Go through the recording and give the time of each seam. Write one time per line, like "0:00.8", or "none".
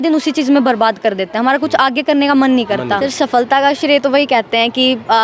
0:03.1